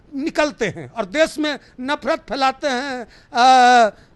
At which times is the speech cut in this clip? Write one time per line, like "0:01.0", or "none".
none